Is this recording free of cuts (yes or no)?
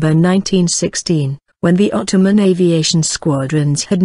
yes